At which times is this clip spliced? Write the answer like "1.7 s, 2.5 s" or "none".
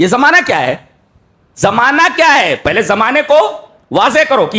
none